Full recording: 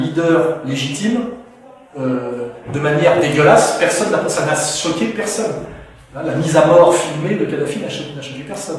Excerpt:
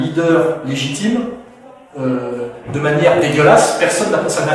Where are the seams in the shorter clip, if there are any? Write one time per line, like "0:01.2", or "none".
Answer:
none